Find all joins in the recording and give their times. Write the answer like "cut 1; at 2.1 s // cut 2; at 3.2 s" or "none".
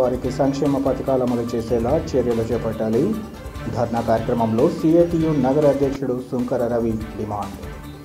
none